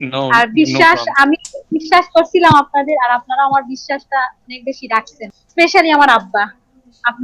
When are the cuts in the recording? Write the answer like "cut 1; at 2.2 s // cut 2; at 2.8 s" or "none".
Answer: cut 1; at 5.4 s